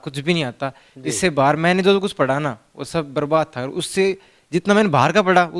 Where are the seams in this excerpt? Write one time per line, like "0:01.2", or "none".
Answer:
none